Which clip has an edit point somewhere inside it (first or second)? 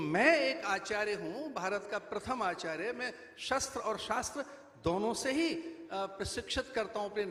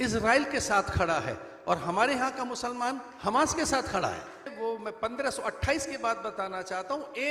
second